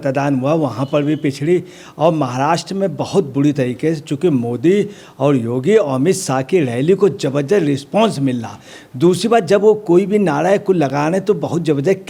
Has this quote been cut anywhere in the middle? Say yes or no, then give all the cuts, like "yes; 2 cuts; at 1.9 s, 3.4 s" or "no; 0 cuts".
no; 0 cuts